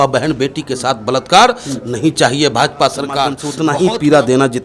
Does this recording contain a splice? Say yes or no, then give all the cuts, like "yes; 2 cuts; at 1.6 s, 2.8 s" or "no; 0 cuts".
yes; 1 cut; at 3.4 s